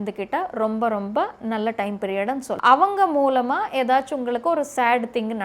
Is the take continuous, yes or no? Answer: no